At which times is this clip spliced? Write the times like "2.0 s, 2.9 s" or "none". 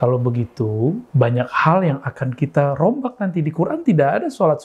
none